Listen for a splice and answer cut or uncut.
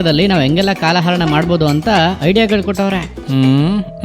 cut